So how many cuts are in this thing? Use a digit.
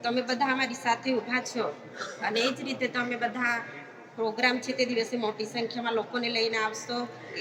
0